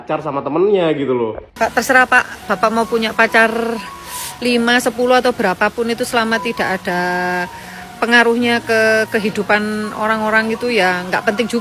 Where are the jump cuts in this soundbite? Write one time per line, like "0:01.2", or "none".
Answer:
0:01.5